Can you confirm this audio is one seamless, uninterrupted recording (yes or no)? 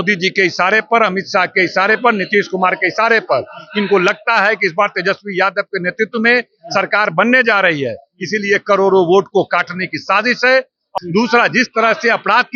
no